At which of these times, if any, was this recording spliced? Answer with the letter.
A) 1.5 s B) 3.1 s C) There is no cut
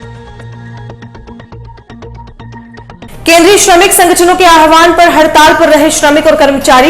C